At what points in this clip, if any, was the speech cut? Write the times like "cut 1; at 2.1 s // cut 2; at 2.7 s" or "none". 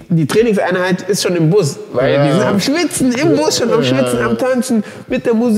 none